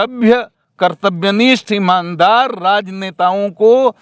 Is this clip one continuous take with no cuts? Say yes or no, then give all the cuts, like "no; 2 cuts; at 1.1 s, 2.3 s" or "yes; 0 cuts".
yes; 0 cuts